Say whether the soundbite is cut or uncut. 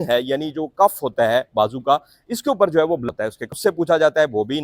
cut